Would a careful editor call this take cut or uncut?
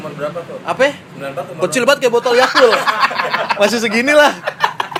uncut